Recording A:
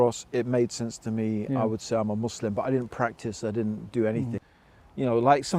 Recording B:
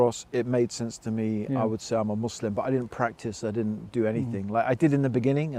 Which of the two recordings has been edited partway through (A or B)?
A